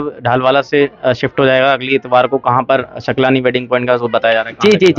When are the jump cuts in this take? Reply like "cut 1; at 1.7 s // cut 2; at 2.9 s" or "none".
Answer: none